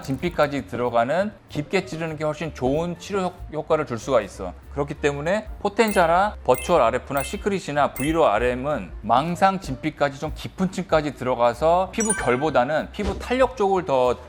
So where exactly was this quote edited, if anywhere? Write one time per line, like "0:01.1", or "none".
none

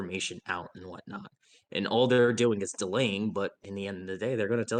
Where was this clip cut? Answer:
none

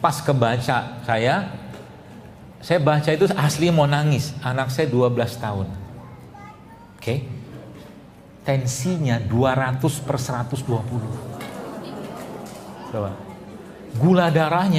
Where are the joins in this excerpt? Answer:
none

